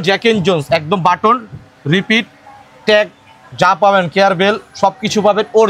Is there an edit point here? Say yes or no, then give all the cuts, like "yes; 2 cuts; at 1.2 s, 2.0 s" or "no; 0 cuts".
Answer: no; 0 cuts